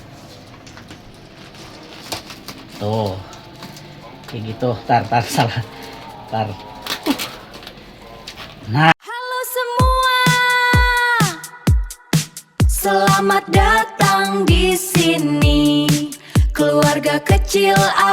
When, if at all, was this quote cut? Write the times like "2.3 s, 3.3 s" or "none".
8.9 s